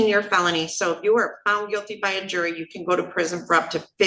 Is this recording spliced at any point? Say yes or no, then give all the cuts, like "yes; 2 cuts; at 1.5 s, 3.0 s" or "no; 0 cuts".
no; 0 cuts